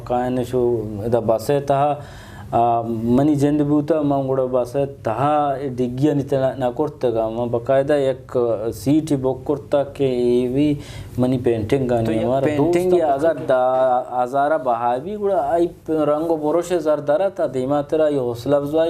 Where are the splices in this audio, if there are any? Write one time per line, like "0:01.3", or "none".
0:12.7